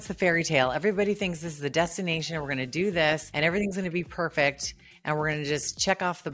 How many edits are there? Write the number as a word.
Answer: one